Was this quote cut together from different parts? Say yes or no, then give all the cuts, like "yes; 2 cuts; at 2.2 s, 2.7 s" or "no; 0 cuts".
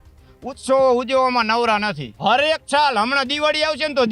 yes; 1 cut; at 2.0 s